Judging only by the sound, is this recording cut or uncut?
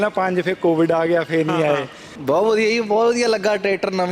cut